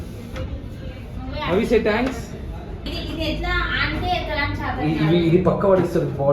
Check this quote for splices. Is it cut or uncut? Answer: cut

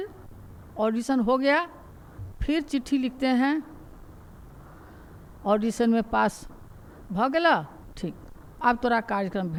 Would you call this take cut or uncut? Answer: uncut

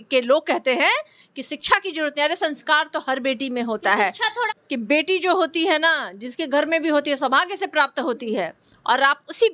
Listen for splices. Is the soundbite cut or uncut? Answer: cut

